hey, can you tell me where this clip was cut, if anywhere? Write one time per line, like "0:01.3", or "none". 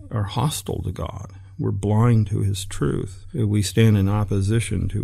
0:03.2